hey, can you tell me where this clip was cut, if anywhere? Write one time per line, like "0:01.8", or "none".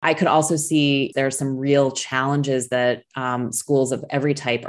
0:01.1